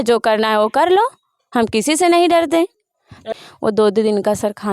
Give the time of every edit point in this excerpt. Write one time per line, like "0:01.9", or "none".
0:03.3